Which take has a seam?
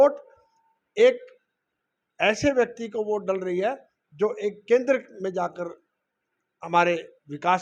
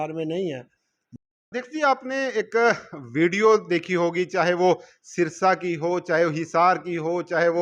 second; 1 cut; at 1.2 s

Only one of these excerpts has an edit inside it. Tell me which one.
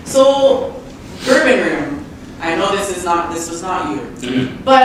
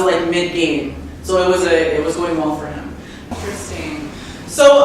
second; 1 cut; at 3.3 s

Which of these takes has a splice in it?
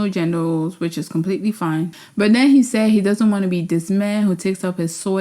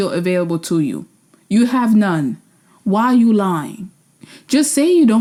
first; 1 cut; at 1.9 s

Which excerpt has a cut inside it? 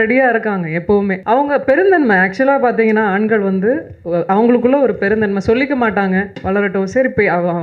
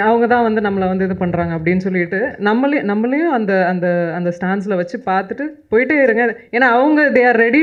first; 2 cuts; at 1.2 s, 6.3 s

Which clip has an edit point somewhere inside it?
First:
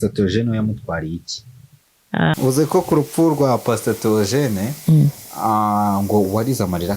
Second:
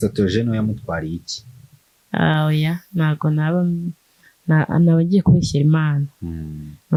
first; 1 cut; at 2.3 s

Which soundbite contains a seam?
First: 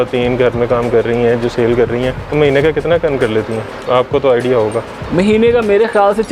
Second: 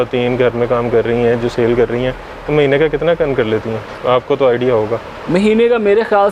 first; 1 cut; at 2.2 s

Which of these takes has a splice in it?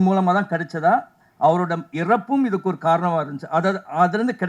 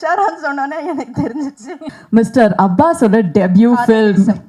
second; 1 cut; at 1.9 s

